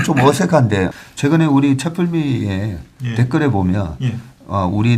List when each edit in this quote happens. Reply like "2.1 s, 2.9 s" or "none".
0.9 s

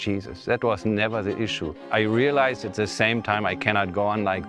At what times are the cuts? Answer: 1.8 s

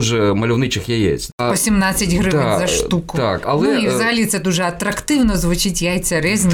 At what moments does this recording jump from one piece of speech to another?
1.3 s, 3.4 s

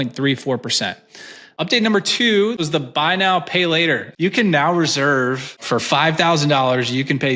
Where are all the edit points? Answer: 1.4 s, 2.6 s, 4.1 s, 5.6 s

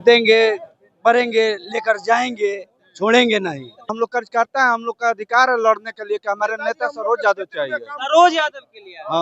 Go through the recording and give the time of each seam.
3.9 s

